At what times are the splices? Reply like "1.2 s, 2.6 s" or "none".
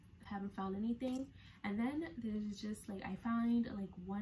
none